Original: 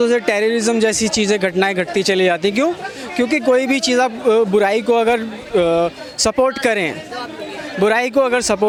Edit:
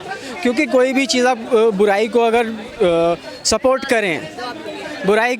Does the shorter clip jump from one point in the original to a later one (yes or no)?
no